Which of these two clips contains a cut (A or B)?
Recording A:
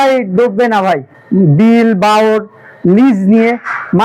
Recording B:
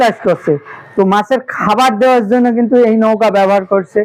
A